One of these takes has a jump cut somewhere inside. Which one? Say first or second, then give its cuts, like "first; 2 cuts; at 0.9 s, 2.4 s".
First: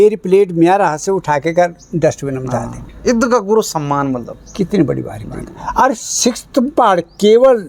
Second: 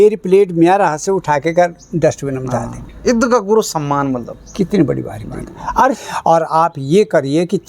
second; 1 cut; at 6.1 s